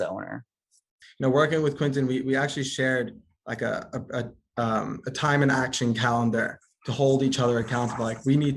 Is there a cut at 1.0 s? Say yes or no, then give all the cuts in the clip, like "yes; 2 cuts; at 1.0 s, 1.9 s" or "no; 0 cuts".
yes; 1 cut; at 1.0 s